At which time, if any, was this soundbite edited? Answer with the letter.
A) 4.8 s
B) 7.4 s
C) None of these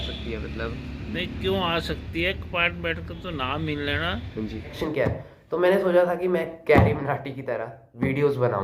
A